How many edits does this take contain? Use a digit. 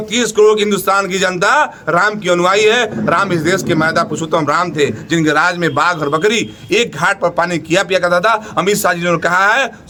0